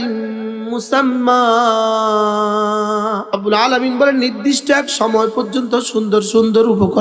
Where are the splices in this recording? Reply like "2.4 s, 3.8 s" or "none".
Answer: 3.3 s